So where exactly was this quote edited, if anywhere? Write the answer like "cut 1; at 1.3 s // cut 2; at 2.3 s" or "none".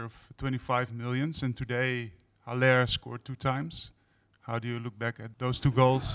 cut 1; at 5.3 s